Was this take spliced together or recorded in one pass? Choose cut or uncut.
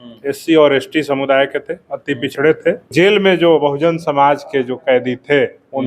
cut